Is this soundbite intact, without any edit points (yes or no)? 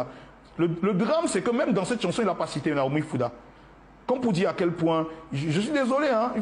yes